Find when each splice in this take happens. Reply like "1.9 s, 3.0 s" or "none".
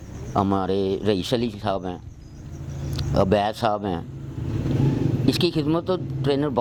none